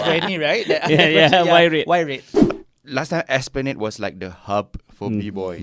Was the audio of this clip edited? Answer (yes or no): yes